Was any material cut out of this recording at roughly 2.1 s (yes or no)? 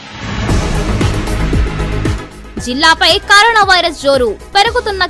yes